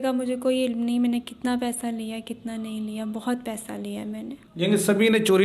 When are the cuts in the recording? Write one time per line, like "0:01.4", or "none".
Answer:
0:04.4